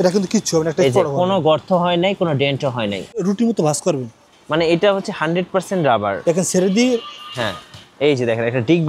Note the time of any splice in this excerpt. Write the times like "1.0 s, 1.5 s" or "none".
3.2 s